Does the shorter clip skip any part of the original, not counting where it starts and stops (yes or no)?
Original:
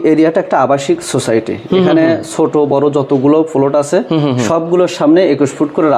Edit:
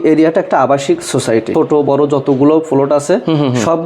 yes